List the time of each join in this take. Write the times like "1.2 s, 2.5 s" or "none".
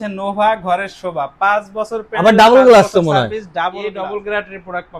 3.8 s

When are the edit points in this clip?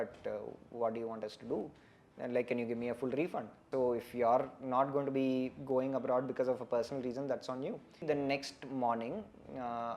3.6 s, 8.0 s

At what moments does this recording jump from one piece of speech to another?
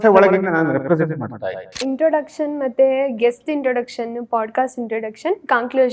1.8 s

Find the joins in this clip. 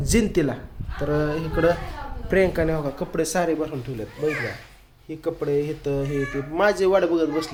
none

